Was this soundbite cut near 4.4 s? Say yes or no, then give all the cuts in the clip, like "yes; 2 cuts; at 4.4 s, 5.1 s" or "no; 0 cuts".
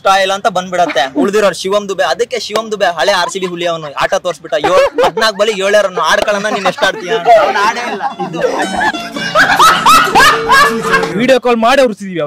no; 1 cut; at 11.1 s